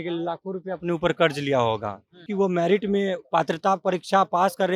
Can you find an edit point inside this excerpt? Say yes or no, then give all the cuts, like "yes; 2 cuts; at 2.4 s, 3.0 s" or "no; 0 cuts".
yes; 1 cut; at 2.3 s